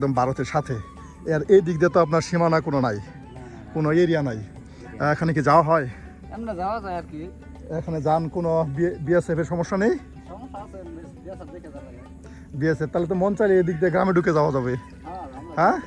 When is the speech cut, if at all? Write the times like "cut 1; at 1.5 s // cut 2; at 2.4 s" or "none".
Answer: none